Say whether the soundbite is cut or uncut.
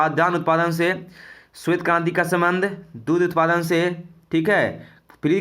uncut